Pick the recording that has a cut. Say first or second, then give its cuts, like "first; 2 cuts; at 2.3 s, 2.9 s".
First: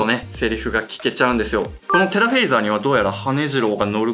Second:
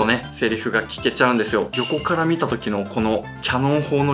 second; 1 cut; at 1.7 s